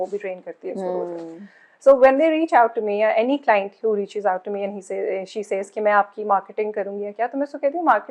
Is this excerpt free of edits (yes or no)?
yes